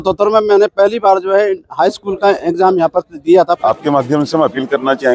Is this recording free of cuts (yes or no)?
no